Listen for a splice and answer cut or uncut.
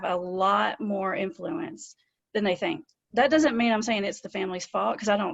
uncut